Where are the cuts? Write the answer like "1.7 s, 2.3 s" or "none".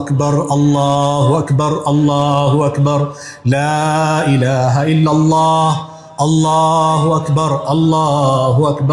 none